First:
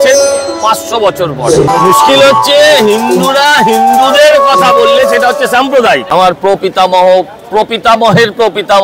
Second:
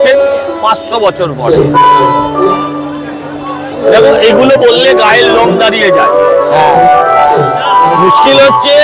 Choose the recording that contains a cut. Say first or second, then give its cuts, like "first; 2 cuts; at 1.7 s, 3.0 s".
first; 2 cuts; at 1.7 s, 6.2 s